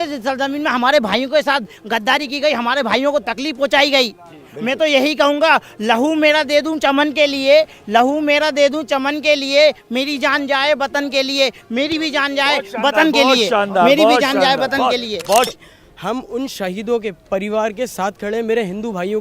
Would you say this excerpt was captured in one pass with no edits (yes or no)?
no